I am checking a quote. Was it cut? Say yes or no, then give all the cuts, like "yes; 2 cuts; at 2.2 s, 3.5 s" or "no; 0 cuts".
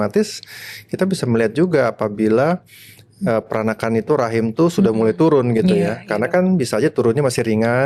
no; 0 cuts